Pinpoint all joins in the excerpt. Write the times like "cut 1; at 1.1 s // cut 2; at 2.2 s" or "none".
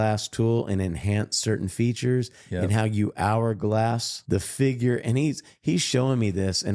none

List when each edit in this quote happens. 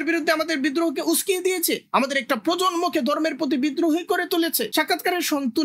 cut 1; at 4.6 s

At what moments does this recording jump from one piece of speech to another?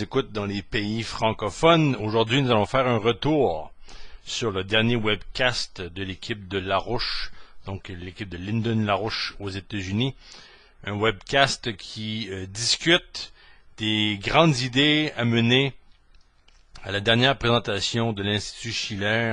none

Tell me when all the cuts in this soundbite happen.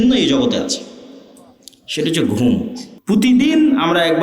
cut 1; at 2.9 s

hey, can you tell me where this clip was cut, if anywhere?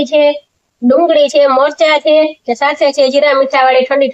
none

